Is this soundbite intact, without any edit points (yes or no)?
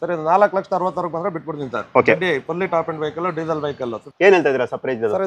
no